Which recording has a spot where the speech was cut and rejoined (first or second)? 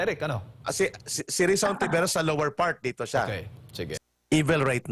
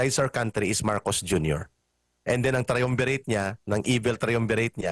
first